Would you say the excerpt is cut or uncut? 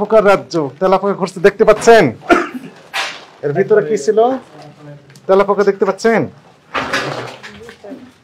uncut